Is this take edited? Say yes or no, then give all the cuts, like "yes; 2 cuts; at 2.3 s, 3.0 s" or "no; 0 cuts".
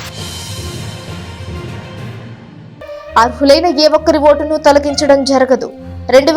no; 0 cuts